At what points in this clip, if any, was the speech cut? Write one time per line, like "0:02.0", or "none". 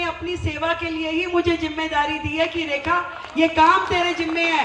none